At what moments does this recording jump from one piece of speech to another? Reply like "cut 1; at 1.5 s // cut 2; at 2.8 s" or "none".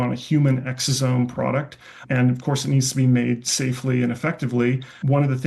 none